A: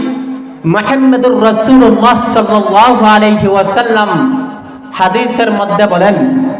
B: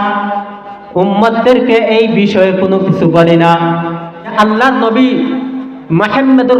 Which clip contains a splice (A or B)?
B